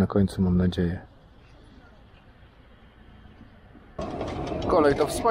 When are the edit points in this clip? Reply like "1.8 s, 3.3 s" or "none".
4.0 s